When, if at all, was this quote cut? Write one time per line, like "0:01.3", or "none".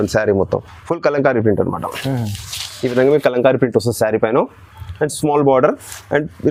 none